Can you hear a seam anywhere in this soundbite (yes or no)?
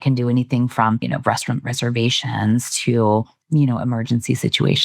yes